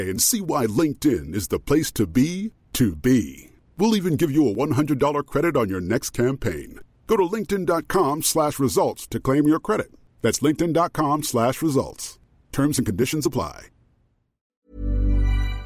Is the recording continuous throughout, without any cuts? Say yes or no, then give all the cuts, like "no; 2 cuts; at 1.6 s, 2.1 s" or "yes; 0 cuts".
no; 1 cut; at 14.6 s